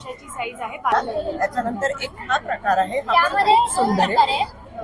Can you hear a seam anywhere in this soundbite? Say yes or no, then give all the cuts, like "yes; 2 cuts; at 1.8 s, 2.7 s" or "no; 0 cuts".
yes; 1 cut; at 0.9 s